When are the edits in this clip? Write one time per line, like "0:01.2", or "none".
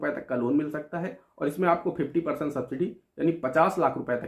none

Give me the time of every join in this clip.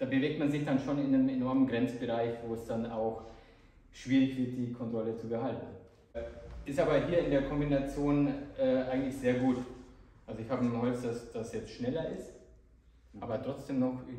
0:06.3

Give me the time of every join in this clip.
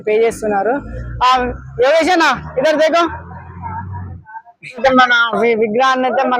0:04.6

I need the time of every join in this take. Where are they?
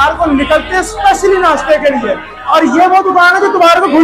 none

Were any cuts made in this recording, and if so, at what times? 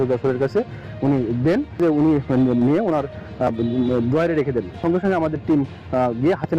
0:01.8
0:04.7

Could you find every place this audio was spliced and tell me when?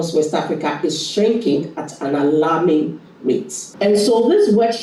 none

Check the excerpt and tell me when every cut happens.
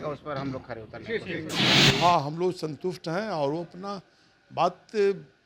0:01.6

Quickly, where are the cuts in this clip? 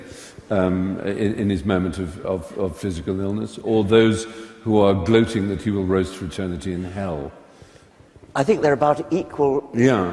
0:01.9

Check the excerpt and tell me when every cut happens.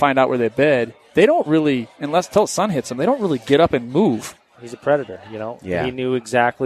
0:04.3

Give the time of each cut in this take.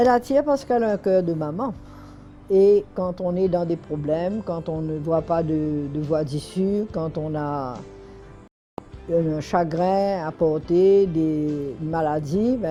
none

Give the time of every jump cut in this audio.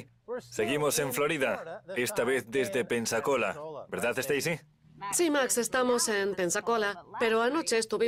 none

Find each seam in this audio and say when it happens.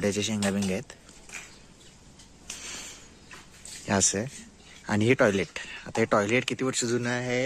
none

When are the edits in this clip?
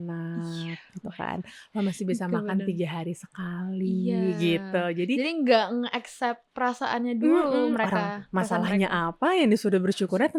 none

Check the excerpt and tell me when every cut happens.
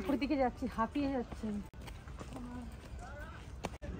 none

